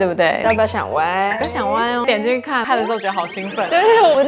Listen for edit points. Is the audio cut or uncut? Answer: uncut